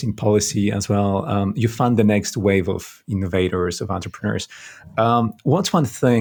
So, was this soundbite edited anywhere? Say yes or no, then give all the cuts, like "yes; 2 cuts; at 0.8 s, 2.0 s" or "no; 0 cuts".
no; 0 cuts